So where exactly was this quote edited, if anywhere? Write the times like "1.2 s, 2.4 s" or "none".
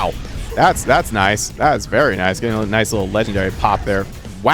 none